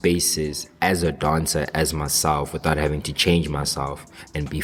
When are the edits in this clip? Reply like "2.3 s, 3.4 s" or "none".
none